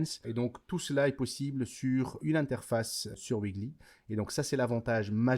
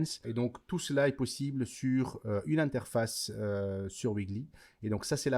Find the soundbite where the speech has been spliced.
first; 2 cuts; at 2.2 s, 3.1 s

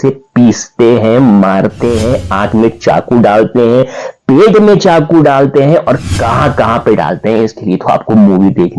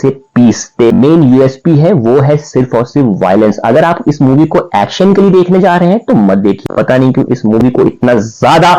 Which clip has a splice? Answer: second; 2 cuts; at 0.9 s, 6.6 s

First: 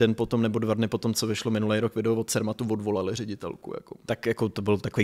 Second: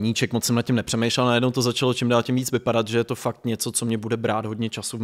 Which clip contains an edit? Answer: first; 1 cut; at 4.1 s

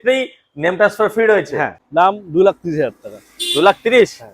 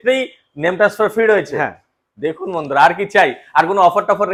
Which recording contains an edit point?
first; 1 cut; at 1.8 s

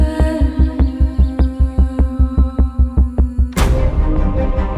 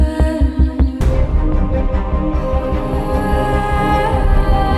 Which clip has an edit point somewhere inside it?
second; 1 cut; at 1.0 s

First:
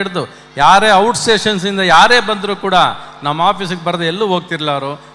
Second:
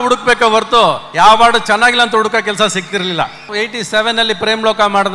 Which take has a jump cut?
second; 1 cut; at 3.5 s

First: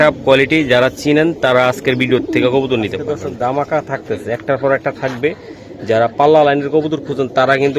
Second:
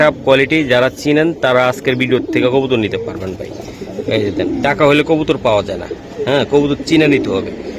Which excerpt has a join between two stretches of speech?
first; 1 cut; at 3.1 s

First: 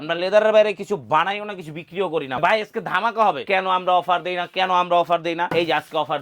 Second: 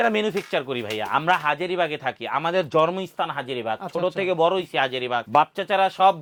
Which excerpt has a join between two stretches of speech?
first; 3 cuts; at 2.4 s, 3.4 s, 5.5 s

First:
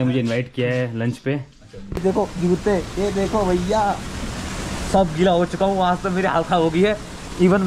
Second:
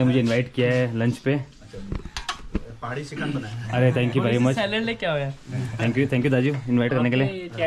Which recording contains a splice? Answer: first; 1 cut; at 2.0 s

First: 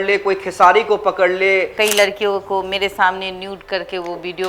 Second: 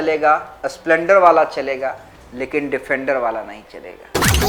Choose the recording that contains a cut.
first; 1 cut; at 1.7 s

